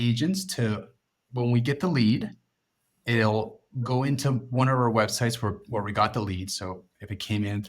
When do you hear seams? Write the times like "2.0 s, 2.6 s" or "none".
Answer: 1.2 s, 5.6 s